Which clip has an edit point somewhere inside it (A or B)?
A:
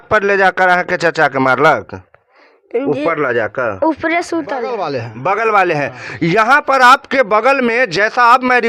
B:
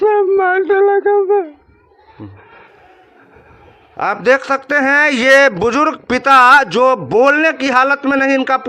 A